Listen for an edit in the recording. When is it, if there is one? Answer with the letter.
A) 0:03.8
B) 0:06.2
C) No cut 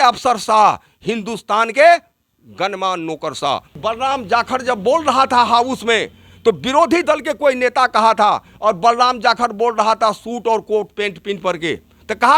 A